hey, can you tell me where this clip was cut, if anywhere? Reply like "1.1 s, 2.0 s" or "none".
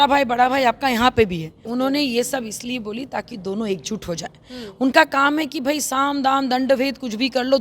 1.6 s